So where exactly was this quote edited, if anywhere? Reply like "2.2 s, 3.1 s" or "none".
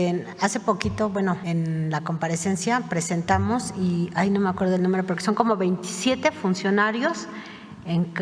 1.4 s